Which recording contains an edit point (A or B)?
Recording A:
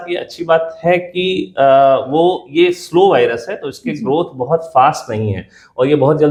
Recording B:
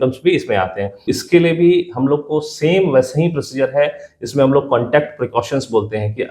B